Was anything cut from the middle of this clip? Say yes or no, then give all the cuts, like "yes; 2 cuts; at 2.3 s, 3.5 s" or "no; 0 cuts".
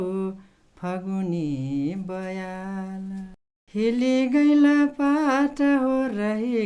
no; 0 cuts